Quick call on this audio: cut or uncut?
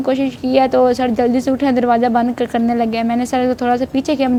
uncut